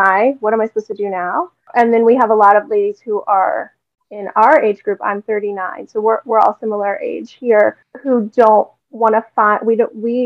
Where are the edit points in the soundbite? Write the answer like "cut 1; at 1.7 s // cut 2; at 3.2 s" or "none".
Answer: cut 1; at 1.7 s // cut 2; at 7.9 s